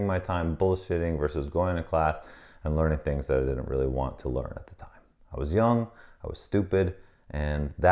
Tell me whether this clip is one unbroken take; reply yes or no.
yes